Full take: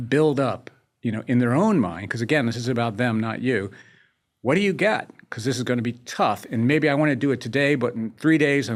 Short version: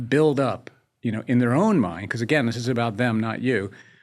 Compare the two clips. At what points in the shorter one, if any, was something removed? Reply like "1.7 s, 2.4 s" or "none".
none